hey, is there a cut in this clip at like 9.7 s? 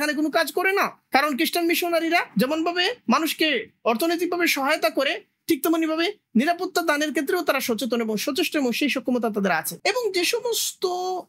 yes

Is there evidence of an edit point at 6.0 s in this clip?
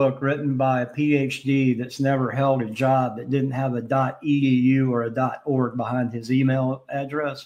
no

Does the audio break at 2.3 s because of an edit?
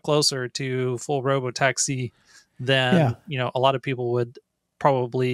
no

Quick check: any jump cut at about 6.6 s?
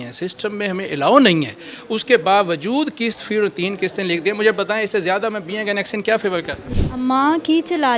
yes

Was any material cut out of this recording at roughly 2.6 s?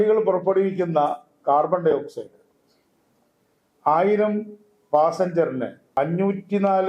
no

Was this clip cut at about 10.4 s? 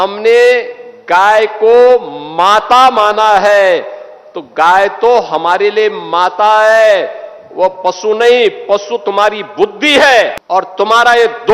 yes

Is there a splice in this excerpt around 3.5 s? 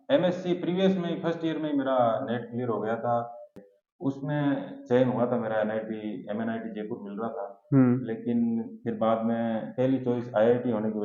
yes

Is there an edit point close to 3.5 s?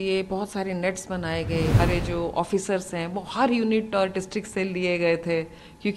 no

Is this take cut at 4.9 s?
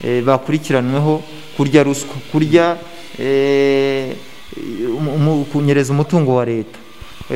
no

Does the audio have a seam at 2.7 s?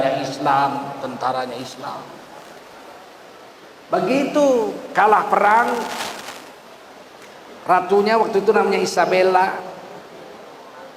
yes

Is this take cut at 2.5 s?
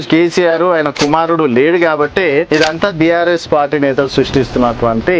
yes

